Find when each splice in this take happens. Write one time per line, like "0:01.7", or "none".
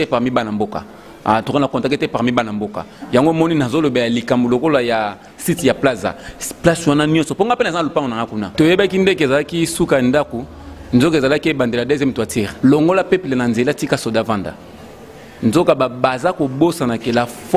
0:08.4
0:12.5